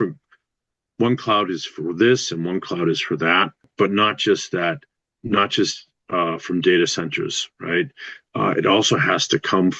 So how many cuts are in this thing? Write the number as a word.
one